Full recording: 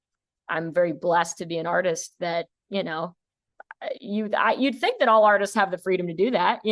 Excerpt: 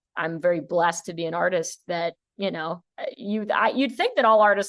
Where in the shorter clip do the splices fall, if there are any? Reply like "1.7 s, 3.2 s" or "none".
2.9 s